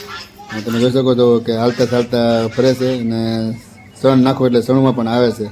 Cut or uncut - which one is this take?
uncut